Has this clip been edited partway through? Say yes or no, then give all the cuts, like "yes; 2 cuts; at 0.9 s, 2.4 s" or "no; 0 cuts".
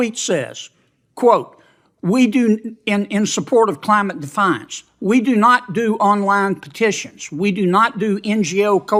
no; 0 cuts